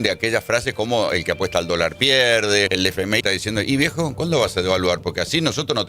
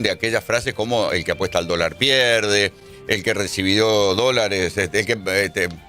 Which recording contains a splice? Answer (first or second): first